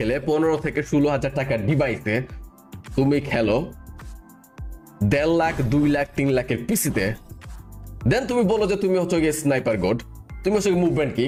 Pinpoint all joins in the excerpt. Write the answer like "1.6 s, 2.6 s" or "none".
none